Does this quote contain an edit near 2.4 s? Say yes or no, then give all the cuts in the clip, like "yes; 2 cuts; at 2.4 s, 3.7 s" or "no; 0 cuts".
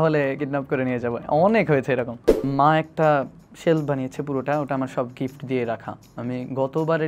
yes; 1 cut; at 2.4 s